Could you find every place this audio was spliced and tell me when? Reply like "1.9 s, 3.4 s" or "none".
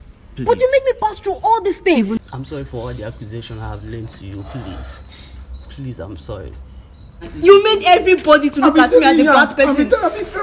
2.2 s, 7.3 s

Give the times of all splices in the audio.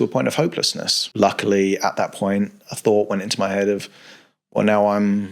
1.0 s

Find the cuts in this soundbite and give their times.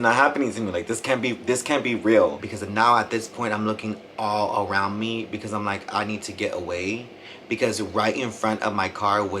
2.4 s

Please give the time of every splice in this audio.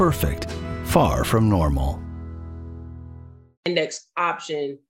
3.7 s

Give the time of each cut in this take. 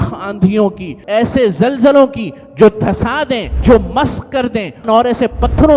0.9 s, 3.6 s, 4.8 s

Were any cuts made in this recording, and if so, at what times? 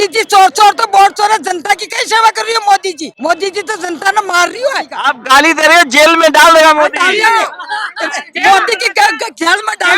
3.1 s, 4.9 s

